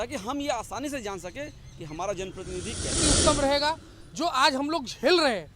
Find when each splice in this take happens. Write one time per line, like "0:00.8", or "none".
0:03.0